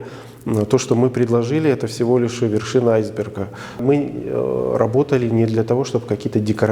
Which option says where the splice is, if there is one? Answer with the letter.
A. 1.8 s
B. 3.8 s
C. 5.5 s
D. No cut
B